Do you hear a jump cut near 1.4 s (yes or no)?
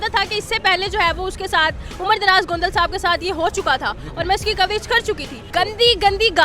no